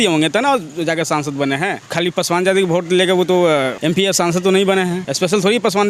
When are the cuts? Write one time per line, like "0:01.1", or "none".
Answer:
0:01.9
0:03.7
0:05.1